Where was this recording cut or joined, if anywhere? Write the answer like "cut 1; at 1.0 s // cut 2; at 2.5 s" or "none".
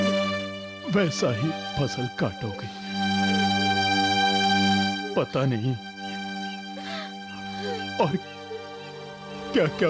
none